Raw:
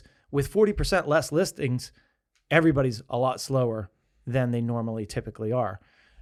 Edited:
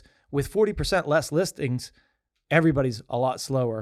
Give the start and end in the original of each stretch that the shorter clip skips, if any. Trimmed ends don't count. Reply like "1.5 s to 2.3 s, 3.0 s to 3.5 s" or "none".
none